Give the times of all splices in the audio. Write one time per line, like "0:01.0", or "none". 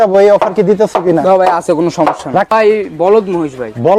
0:02.5